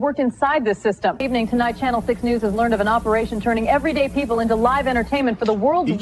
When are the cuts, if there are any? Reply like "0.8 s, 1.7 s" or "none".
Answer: 1.2 s